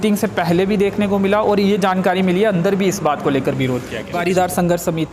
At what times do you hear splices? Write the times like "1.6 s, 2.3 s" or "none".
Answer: 4.1 s